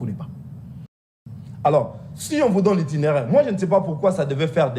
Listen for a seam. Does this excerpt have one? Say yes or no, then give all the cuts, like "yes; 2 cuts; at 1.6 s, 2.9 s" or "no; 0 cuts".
yes; 1 cut; at 0.9 s